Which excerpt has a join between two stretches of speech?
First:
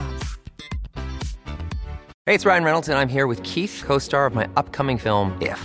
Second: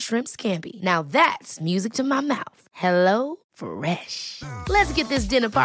first; 1 cut; at 2.1 s

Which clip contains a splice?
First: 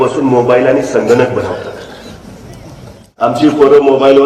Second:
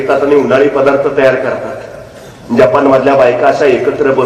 first; 1 cut; at 3.2 s

